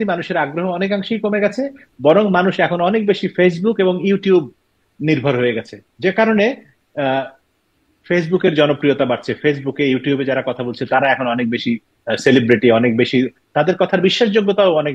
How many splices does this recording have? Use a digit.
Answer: 0